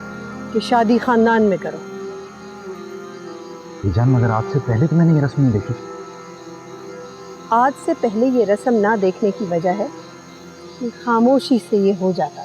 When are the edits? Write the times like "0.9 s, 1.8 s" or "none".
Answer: none